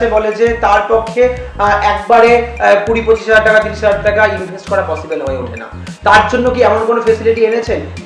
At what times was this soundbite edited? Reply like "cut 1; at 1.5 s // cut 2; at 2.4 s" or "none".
none